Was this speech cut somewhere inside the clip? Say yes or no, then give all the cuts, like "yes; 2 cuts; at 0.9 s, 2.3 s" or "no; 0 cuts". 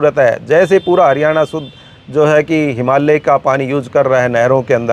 no; 0 cuts